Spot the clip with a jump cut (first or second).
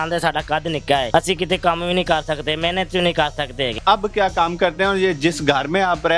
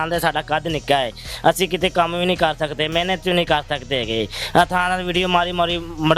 first